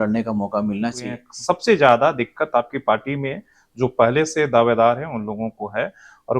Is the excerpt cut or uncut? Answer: cut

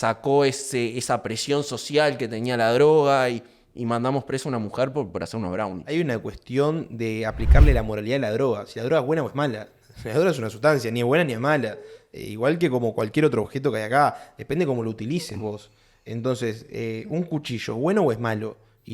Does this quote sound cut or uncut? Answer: cut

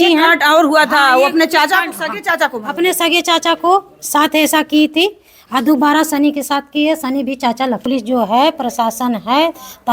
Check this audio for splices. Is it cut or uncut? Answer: cut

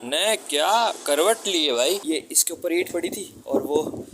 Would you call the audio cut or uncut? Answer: cut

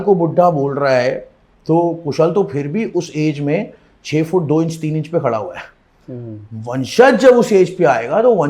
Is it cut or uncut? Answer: uncut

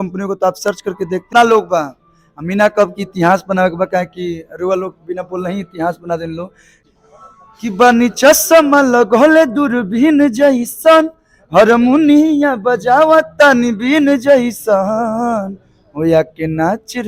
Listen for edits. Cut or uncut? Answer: cut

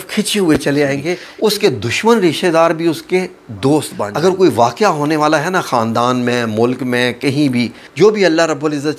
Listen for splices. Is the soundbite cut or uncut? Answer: cut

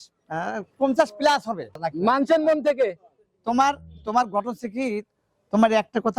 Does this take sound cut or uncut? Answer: cut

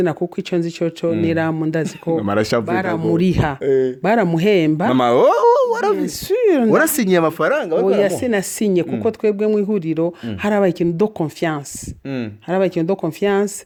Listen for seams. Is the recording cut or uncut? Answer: uncut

